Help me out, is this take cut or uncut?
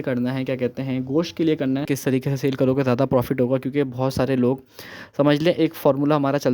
cut